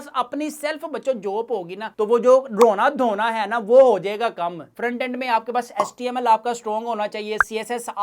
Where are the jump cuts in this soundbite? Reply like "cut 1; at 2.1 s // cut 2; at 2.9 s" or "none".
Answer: cut 1; at 4.6 s